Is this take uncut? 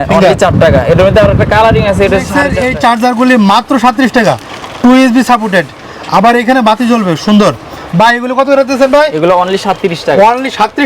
no; 1 cut; at 2.4 s

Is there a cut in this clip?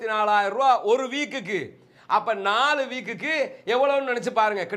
no; 0 cuts

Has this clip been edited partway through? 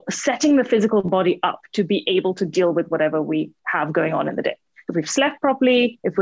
no; 0 cuts

